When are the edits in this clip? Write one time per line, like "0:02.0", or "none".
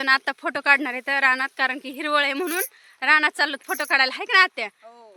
none